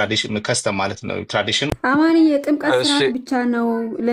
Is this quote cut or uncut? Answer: cut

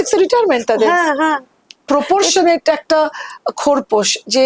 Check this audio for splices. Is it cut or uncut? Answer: cut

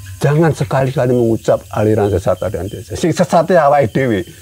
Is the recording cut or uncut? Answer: uncut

